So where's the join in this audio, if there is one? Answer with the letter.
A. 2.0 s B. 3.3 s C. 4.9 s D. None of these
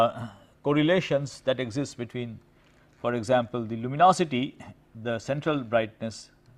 A